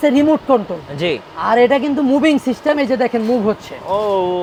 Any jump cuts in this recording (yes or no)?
no